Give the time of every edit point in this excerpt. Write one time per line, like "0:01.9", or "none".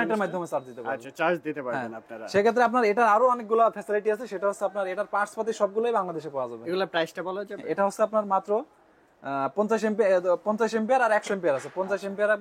none